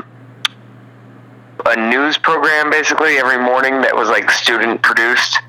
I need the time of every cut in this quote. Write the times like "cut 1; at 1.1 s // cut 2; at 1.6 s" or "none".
cut 1; at 1.6 s